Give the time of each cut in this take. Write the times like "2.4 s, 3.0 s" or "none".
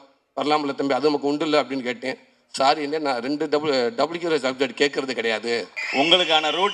5.8 s